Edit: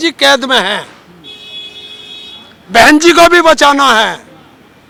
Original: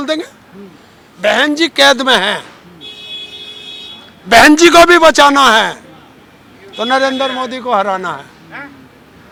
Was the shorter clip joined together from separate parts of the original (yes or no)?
no